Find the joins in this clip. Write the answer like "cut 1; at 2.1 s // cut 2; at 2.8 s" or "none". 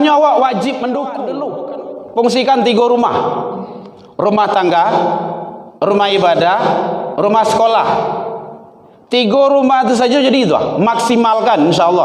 cut 1; at 1.2 s